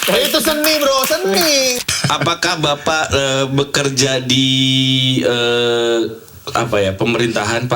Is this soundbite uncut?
no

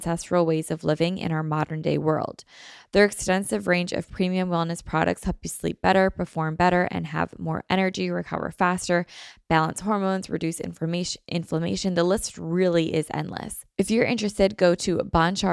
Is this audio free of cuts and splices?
no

